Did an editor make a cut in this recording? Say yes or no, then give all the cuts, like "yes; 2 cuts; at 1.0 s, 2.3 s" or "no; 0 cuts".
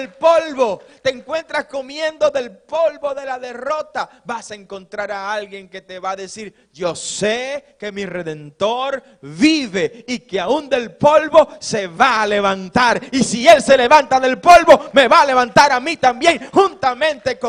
no; 0 cuts